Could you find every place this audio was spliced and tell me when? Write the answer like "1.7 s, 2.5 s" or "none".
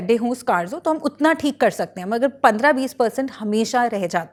none